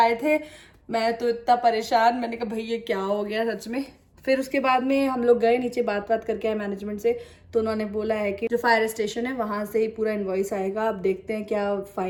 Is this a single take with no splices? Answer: yes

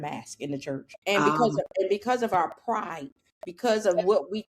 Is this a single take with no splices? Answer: no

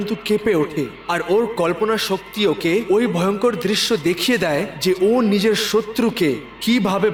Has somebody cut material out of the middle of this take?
no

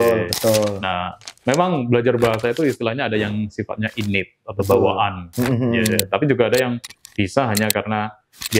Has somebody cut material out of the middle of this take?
no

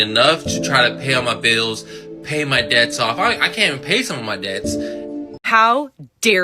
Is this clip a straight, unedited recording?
no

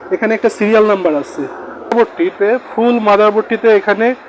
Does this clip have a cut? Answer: yes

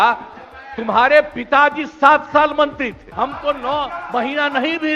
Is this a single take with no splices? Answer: no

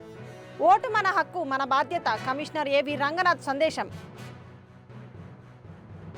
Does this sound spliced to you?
no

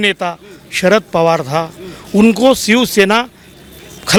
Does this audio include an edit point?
no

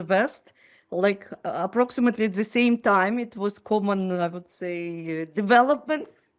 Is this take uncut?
yes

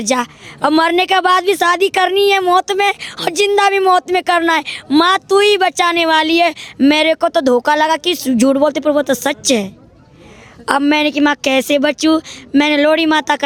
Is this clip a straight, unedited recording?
yes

